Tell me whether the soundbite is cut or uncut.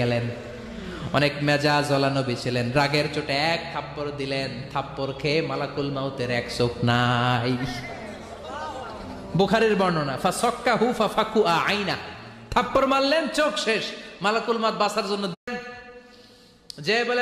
cut